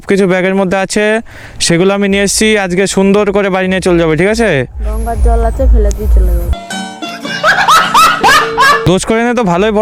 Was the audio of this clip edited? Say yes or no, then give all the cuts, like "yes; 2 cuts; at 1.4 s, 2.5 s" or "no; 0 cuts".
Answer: no; 0 cuts